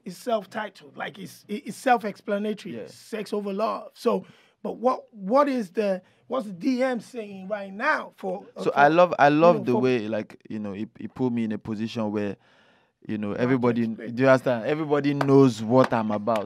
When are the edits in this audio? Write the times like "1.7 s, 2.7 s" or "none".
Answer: none